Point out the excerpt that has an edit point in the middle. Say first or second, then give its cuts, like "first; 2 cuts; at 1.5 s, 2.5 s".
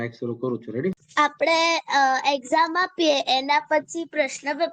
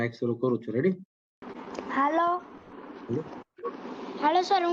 first; 1 cut; at 1.0 s